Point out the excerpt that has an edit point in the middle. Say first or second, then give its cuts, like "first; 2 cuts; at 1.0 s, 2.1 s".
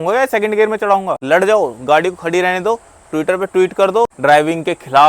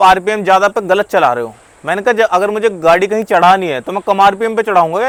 first; 2 cuts; at 1.1 s, 4.1 s